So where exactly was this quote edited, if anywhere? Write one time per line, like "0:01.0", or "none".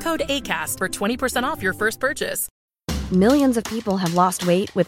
0:02.5